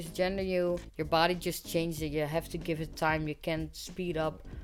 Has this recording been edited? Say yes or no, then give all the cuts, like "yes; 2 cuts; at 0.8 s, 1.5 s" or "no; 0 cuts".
yes; 1 cut; at 0.9 s